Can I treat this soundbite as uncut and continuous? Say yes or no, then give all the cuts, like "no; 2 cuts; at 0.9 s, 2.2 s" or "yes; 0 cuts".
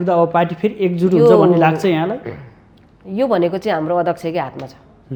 yes; 0 cuts